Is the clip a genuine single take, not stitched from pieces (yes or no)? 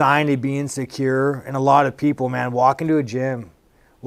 yes